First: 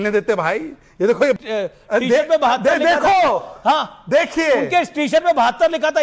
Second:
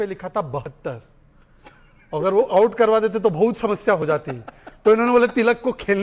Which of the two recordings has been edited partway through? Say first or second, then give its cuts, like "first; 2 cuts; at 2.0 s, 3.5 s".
first; 1 cut; at 1.4 s